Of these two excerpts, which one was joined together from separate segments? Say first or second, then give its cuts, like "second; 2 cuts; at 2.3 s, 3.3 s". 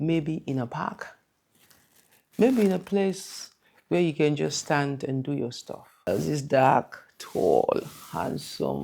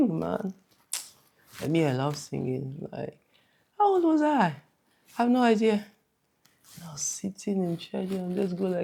first; 1 cut; at 6.1 s